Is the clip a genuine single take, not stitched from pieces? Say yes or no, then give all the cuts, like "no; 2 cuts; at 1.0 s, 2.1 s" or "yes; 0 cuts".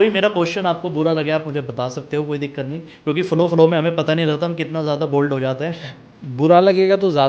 yes; 0 cuts